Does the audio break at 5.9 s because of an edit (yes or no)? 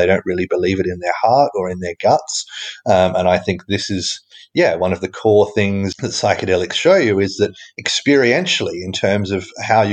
yes